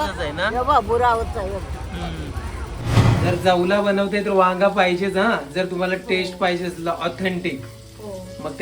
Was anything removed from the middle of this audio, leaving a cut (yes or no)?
yes